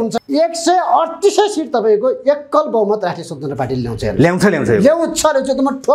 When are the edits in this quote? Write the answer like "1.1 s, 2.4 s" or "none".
none